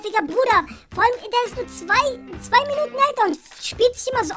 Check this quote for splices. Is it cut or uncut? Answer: uncut